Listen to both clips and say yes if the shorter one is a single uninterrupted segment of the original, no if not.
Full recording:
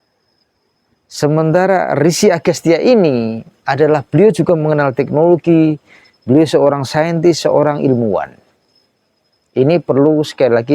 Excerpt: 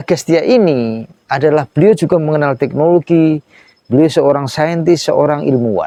yes